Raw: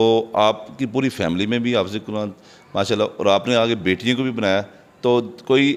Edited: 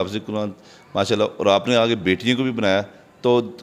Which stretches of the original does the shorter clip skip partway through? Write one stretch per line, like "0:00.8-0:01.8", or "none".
none